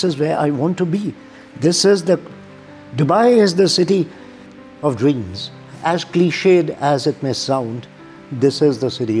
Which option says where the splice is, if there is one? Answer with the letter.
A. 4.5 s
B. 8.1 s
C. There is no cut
A